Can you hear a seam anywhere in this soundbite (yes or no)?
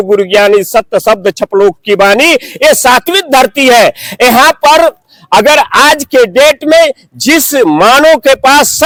no